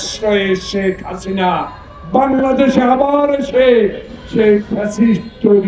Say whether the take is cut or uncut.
uncut